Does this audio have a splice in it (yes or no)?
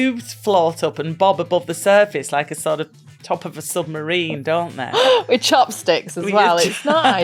no